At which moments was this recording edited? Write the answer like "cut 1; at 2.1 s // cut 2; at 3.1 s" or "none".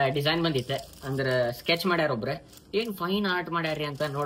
none